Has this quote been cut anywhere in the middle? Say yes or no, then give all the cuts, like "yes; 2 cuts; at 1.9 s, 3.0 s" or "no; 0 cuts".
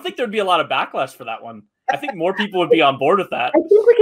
no; 0 cuts